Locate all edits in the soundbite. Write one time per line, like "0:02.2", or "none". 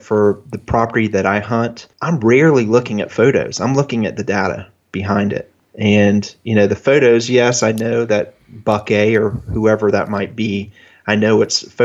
0:01.9

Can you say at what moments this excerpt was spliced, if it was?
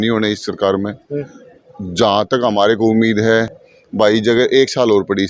none

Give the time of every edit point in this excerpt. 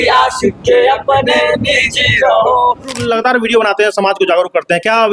0:03.0

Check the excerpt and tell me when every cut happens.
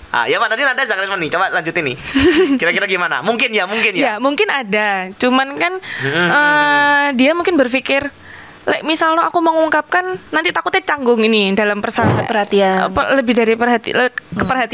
0:12.2

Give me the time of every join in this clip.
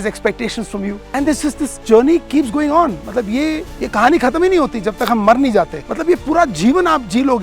0:01.0
0:03.7
0:05.8

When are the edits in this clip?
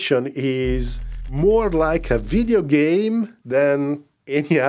0:03.4

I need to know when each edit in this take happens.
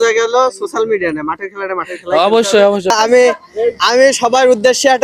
0:02.9

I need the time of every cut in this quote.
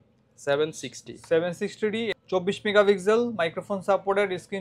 0:02.1

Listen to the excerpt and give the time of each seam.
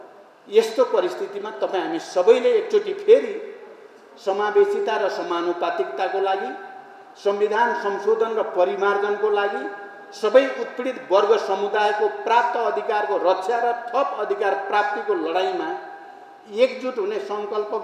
none

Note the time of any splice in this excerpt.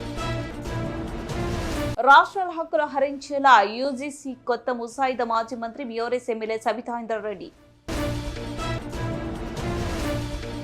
0:01.4

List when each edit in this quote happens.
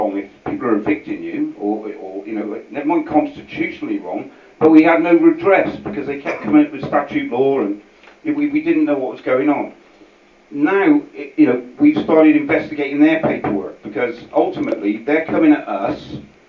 none

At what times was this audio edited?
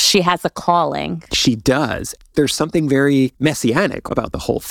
0:02.2
0:03.7

